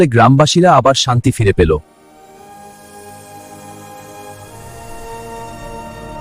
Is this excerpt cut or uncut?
uncut